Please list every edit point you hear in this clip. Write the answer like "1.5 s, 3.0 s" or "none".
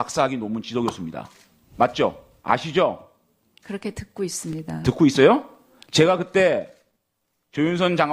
2.9 s